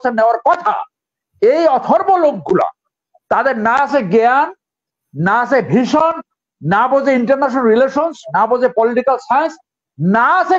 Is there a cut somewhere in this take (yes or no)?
no